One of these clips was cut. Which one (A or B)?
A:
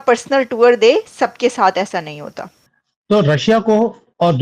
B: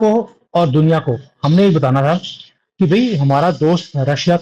A